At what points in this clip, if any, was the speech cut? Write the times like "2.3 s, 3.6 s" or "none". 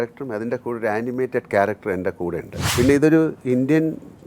2.6 s